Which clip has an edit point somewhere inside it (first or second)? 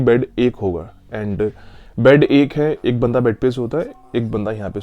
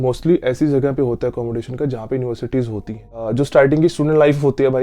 second